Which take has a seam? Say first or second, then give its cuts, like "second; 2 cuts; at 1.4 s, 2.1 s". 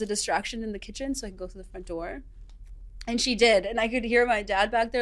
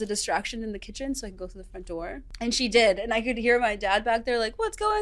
second; 1 cut; at 2.3 s